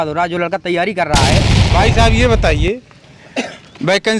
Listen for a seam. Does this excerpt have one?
yes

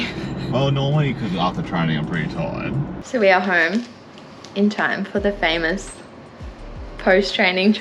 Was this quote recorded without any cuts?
no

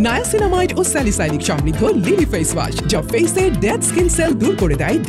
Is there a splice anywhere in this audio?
no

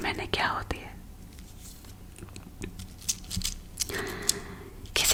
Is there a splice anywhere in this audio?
no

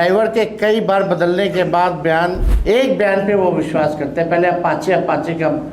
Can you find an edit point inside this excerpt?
yes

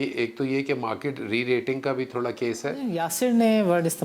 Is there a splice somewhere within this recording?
yes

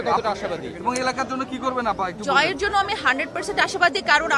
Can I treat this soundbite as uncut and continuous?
yes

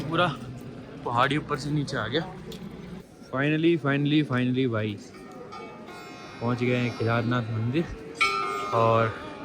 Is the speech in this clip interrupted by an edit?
yes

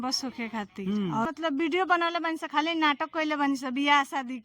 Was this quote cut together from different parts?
yes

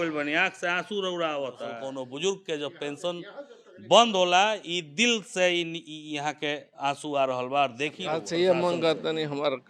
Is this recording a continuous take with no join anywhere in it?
no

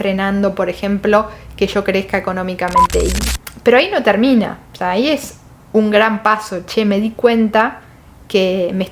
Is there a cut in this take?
yes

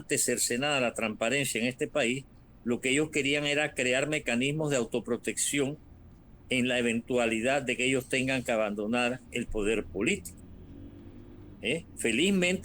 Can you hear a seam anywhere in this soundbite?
no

